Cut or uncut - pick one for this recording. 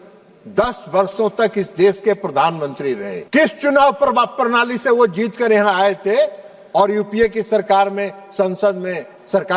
cut